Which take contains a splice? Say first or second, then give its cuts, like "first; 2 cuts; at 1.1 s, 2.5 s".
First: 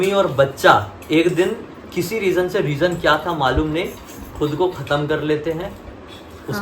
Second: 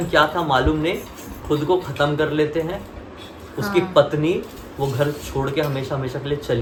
first; 1 cut; at 0.9 s